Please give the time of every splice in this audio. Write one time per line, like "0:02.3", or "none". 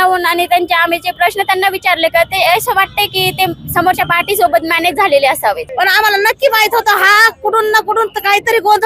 0:05.7